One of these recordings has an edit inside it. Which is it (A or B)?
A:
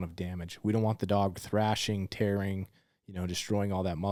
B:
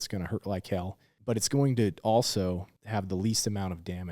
B